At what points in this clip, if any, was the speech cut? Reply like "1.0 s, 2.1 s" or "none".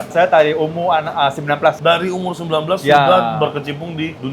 none